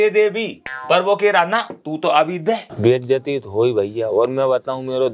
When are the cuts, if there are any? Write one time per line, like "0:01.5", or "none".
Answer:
0:02.7